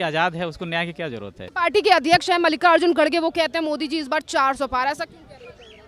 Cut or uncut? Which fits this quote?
cut